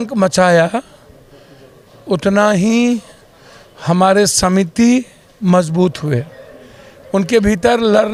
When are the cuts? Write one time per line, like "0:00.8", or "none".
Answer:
none